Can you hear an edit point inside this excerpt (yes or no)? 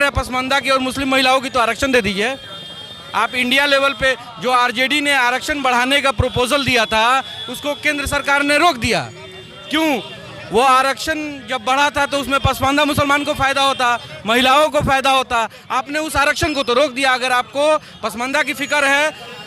no